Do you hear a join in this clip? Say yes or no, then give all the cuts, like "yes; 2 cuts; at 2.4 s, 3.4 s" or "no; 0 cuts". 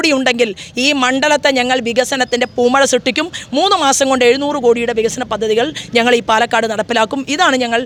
no; 0 cuts